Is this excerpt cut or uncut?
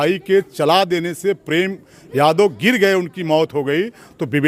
uncut